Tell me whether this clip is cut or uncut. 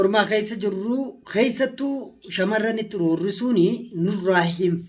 uncut